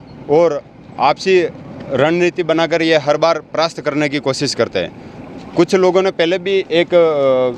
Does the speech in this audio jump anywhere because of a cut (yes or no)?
no